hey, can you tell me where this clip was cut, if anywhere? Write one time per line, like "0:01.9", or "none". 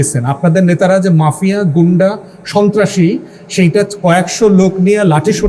none